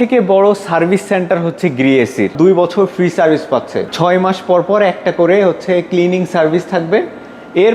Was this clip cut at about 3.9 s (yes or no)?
yes